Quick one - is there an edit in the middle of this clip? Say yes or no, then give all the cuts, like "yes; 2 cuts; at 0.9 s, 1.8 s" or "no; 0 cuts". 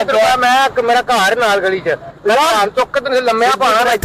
no; 0 cuts